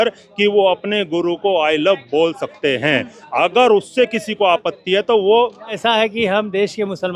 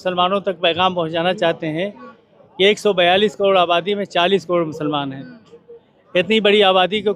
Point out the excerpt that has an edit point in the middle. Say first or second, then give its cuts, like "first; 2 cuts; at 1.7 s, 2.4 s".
first; 1 cut; at 5.8 s